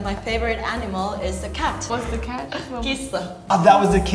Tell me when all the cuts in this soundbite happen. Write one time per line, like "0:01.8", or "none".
0:01.9